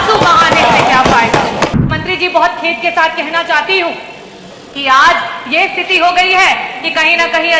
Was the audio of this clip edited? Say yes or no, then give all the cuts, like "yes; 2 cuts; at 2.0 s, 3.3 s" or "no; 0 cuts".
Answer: yes; 1 cut; at 1.9 s